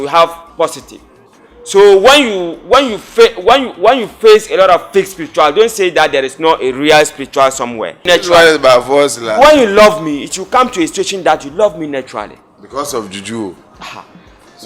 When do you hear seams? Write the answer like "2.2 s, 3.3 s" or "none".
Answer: 8.0 s